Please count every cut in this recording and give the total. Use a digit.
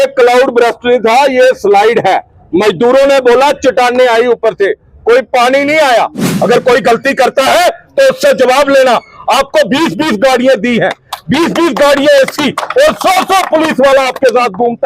1